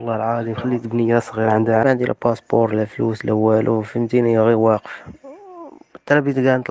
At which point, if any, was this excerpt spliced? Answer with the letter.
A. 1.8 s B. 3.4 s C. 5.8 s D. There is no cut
A